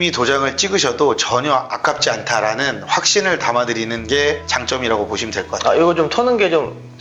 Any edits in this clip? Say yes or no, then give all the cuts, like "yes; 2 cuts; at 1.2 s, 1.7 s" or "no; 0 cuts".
no; 0 cuts